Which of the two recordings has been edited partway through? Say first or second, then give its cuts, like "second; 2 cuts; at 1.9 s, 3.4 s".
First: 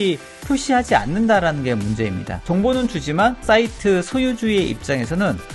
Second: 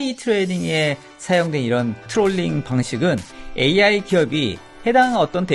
first; 1 cut; at 2.3 s